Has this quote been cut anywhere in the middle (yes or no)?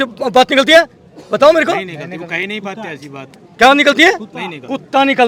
no